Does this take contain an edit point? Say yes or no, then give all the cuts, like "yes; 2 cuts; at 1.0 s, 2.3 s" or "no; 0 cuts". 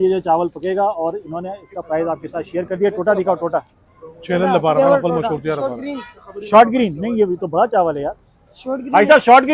no; 0 cuts